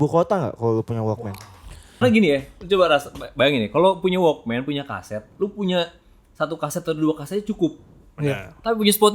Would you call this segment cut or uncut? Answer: cut